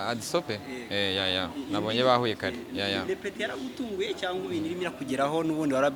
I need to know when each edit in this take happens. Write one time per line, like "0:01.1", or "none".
none